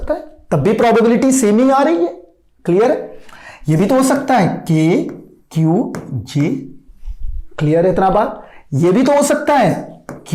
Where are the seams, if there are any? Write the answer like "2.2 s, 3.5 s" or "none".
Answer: none